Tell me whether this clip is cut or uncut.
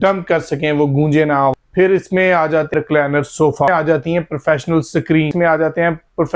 cut